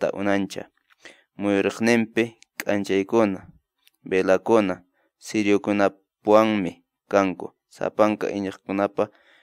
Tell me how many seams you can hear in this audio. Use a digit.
0